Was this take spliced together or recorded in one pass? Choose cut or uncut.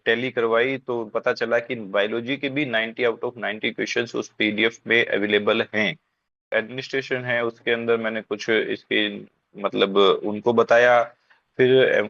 cut